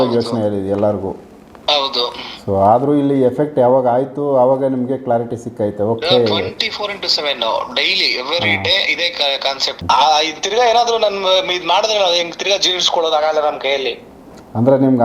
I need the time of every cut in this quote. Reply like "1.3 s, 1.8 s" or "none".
9.8 s